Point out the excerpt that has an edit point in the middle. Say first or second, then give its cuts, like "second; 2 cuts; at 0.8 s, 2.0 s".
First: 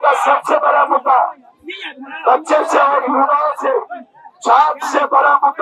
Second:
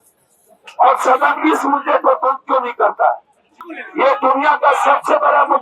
second; 1 cut; at 3.5 s